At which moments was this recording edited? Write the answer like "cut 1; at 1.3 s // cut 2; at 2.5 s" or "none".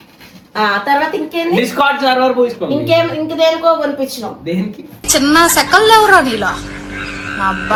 none